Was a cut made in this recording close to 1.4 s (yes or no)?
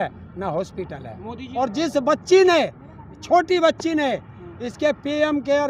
yes